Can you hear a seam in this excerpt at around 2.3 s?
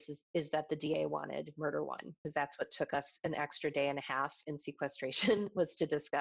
yes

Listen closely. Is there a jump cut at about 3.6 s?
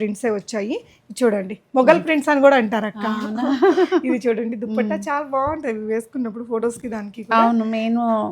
no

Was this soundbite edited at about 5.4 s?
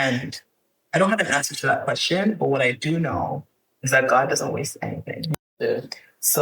yes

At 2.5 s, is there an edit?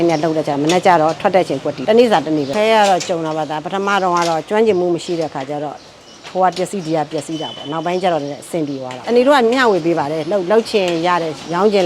yes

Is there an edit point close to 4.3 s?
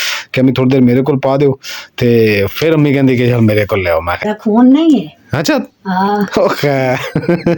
yes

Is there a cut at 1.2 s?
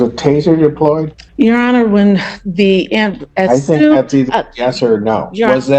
yes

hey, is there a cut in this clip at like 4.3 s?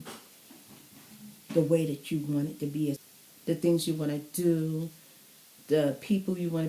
no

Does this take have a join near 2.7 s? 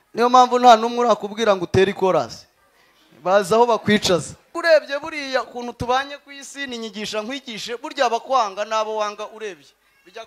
no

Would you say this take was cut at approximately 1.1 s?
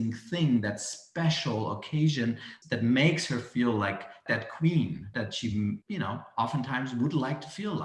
no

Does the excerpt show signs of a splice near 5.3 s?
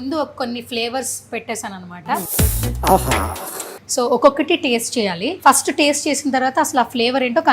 yes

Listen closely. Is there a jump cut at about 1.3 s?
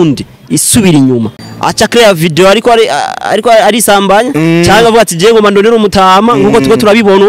yes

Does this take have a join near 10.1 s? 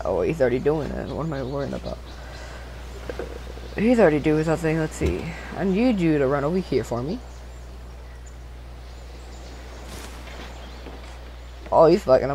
yes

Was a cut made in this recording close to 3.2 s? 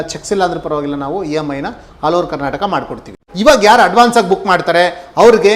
yes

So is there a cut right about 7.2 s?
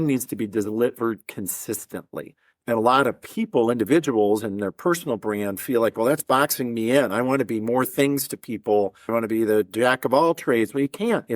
no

